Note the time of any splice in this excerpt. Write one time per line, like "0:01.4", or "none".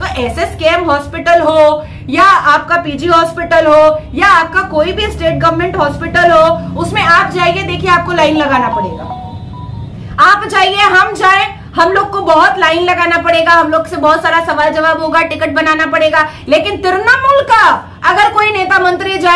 none